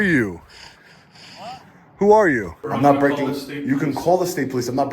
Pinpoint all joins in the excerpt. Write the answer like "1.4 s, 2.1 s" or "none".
2.6 s